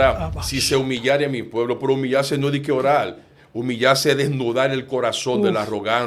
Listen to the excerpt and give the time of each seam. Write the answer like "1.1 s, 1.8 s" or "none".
none